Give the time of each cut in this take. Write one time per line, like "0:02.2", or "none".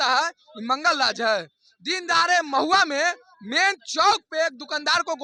none